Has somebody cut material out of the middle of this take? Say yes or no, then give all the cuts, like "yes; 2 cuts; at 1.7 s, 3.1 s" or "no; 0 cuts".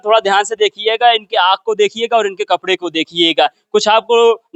no; 0 cuts